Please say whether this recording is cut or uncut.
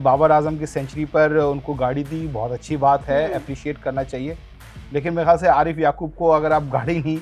uncut